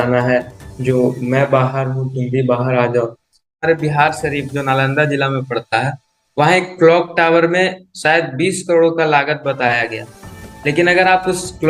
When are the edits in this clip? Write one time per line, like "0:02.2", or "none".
0:03.5